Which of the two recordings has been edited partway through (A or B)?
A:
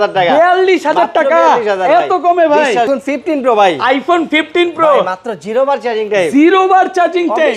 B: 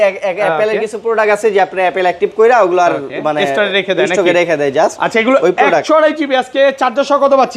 A